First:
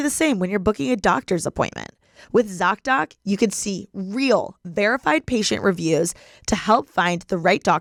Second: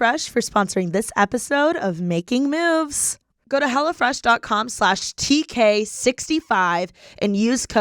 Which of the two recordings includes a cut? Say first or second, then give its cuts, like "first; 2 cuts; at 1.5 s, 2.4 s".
second; 1 cut; at 3.2 s